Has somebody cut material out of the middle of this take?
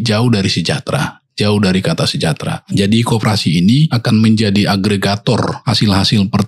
yes; 3 cuts; at 2.5 s, 4.0 s, 5.6 s

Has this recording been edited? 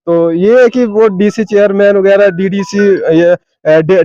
no; 0 cuts

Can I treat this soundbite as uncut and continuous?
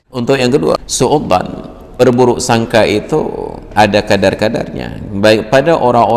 no; 2 cuts; at 0.9 s, 2.0 s

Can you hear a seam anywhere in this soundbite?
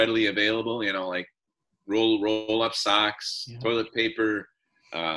no; 0 cuts

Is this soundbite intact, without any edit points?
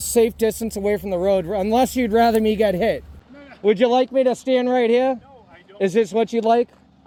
yes; 0 cuts

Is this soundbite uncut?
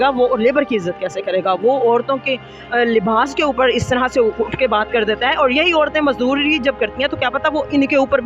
yes; 0 cuts

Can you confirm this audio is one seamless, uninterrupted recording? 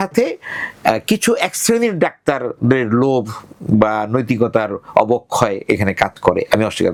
yes; 0 cuts

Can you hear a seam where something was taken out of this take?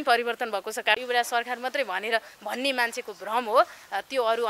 yes; 1 cut; at 1.0 s

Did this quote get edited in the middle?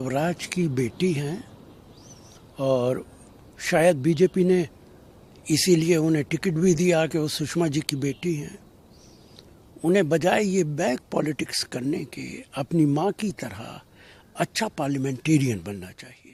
no; 0 cuts

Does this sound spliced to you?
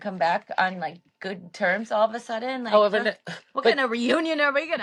no; 0 cuts

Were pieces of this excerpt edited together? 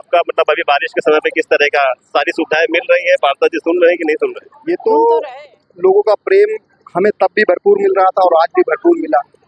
yes; 1 cut; at 4.5 s

